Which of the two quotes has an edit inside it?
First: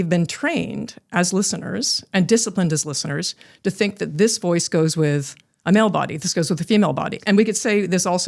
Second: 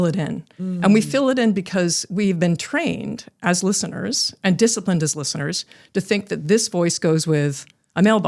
first; 1 cut; at 7.1 s

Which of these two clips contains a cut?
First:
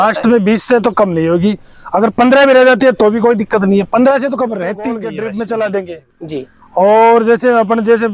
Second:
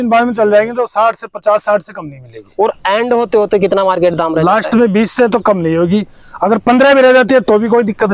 first; 1 cut; at 5.0 s

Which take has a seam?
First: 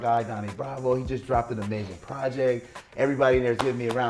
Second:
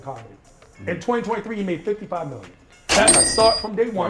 second; 1 cut; at 3.2 s

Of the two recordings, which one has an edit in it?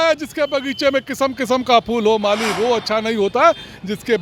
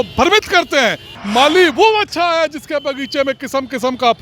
second; 1 cut; at 1.1 s

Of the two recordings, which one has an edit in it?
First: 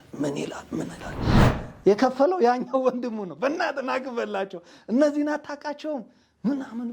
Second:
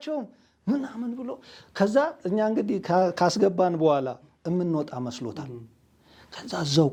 first; 1 cut; at 1.3 s

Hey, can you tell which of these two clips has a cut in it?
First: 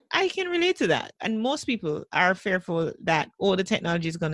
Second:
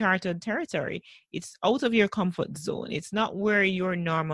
first; 1 cut; at 1.1 s

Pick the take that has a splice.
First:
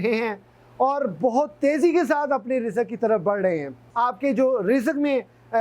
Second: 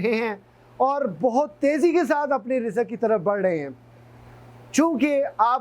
first; 1 cut; at 3.8 s

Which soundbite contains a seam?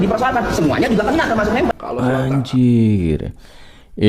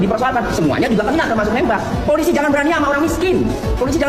first; 1 cut; at 1.7 s

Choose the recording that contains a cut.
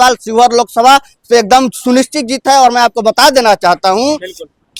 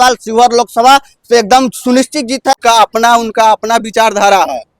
second; 1 cut; at 2.5 s

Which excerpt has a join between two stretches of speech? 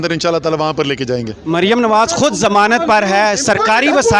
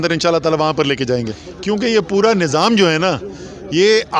second; 1 cut; at 1.3 s

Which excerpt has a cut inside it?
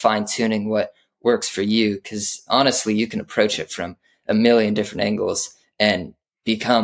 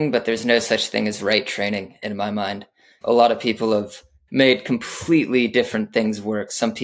second; 2 cuts; at 3.0 s, 4.1 s

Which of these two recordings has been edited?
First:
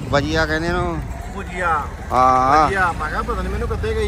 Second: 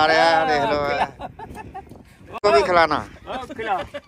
second; 1 cut; at 2.4 s

